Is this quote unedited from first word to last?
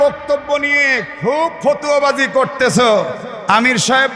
no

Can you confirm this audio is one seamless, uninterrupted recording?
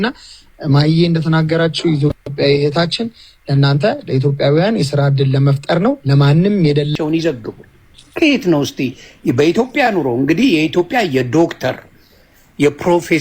no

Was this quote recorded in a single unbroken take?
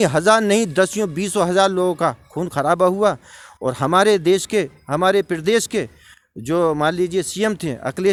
yes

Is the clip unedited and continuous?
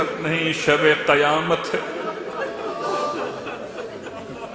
yes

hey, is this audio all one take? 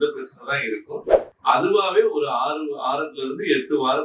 no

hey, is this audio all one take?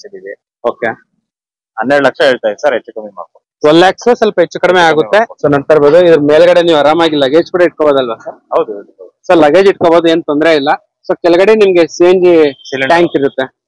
no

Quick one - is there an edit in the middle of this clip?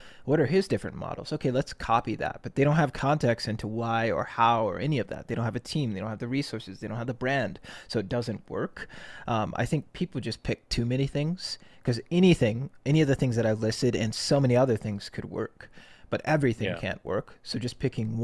no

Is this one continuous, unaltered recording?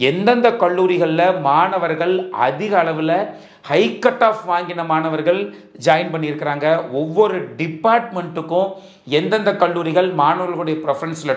yes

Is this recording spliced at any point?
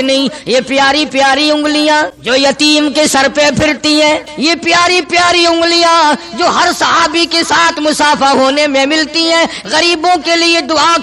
yes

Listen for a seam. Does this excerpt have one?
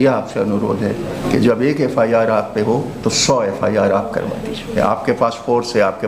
yes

